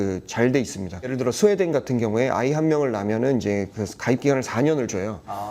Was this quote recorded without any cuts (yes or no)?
no